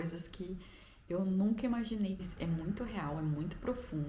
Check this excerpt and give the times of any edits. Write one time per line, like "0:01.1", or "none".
0:02.3